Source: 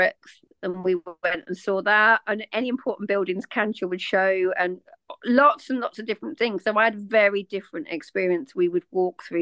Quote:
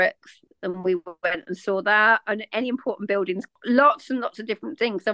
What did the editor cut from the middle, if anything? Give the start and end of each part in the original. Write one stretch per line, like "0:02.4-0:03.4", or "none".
0:03.5-0:05.1